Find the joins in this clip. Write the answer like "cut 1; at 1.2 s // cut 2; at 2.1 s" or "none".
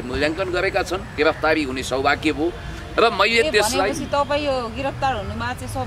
cut 1; at 1.1 s